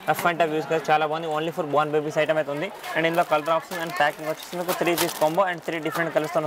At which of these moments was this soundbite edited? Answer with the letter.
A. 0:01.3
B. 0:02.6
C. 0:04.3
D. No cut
D